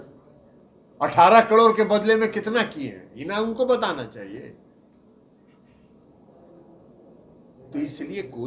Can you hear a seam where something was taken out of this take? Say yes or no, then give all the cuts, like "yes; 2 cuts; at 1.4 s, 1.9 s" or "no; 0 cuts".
no; 0 cuts